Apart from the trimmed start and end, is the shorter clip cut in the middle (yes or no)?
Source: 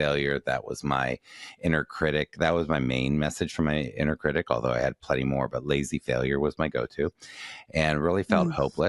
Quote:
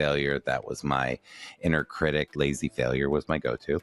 yes